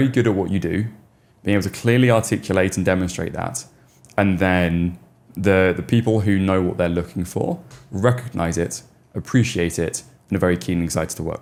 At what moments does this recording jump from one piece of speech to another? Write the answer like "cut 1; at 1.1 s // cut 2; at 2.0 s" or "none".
none